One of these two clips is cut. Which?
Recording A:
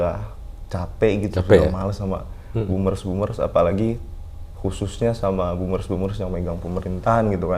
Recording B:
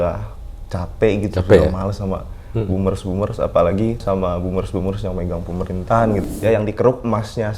B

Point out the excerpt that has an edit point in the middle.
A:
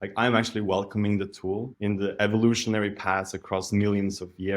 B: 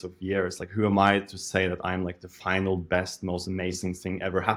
A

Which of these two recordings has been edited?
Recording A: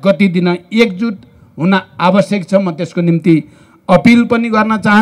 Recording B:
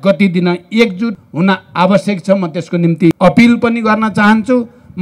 B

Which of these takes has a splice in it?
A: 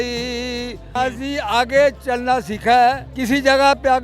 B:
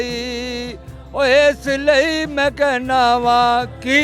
A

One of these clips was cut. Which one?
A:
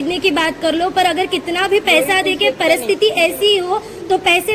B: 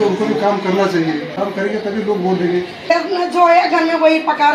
B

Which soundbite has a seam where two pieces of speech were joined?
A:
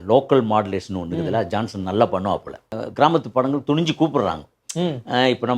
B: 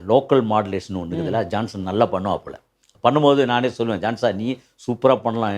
A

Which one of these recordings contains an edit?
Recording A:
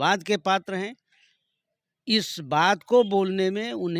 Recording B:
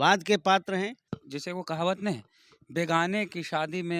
B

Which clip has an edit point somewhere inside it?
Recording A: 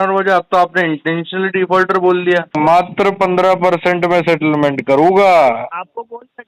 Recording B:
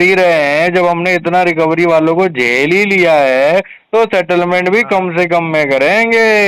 A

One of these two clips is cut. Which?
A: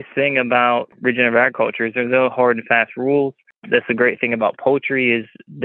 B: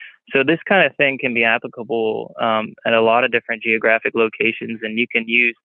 A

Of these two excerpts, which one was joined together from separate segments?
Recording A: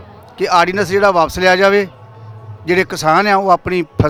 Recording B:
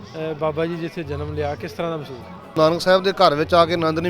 B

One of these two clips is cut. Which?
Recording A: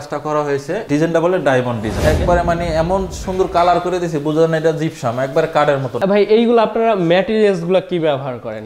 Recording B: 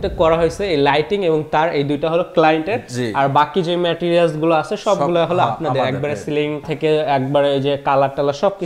A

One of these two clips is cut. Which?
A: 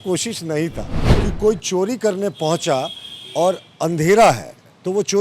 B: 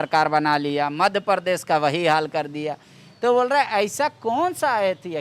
A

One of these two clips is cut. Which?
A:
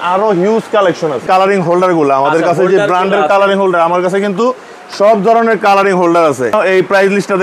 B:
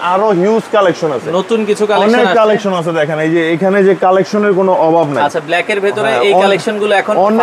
A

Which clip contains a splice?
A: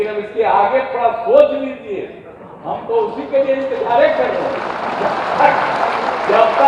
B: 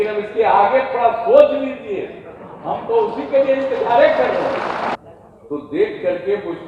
B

